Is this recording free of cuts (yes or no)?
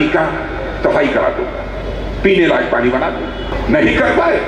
no